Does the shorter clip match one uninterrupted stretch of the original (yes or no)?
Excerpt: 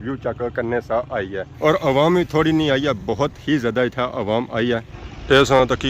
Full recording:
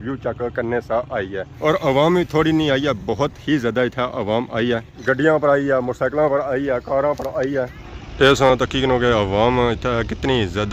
no